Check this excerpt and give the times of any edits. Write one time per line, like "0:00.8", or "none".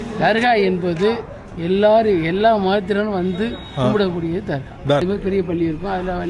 0:05.0